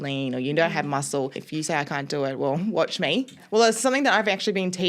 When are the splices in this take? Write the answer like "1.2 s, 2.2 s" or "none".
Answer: 1.4 s, 3.4 s

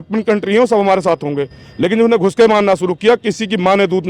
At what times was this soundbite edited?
none

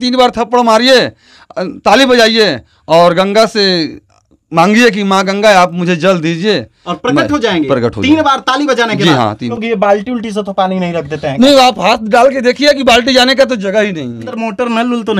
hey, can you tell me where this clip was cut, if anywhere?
9.5 s, 14.2 s

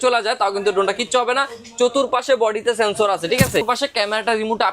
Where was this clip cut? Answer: 3.6 s

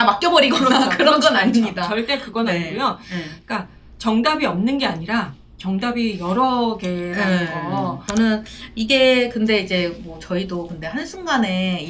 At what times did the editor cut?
none

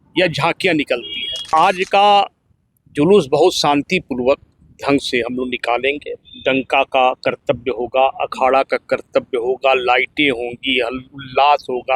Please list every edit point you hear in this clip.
1.5 s

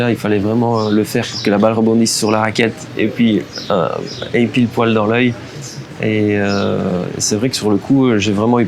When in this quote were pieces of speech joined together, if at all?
none

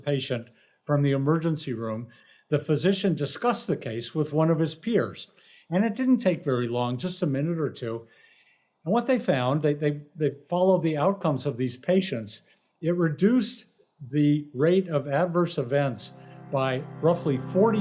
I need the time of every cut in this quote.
none

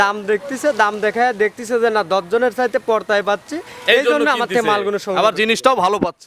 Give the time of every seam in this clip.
none

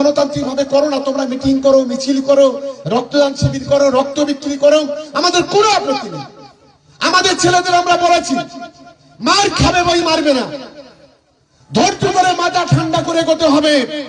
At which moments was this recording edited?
none

